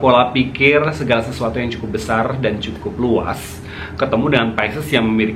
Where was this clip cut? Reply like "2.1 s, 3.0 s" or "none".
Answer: none